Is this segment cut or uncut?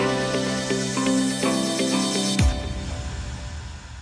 cut